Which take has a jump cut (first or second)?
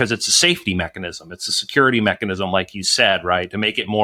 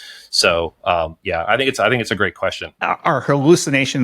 second